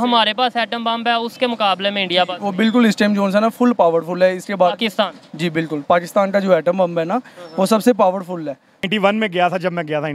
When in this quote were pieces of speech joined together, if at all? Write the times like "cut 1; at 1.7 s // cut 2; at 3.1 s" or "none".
cut 1; at 8.9 s